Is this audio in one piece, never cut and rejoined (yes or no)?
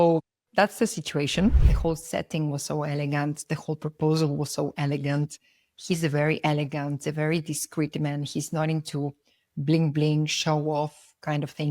no